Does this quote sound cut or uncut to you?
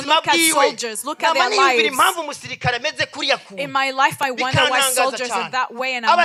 uncut